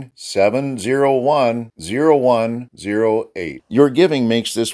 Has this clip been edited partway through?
no; 0 cuts

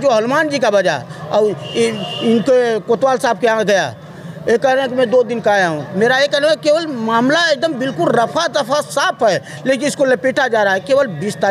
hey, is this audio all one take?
yes; 0 cuts

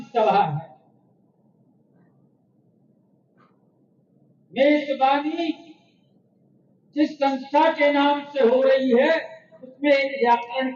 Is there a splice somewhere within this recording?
no; 0 cuts

